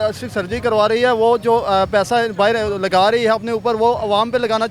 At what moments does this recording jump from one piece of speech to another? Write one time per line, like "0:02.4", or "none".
none